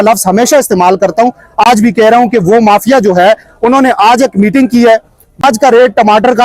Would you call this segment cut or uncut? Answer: cut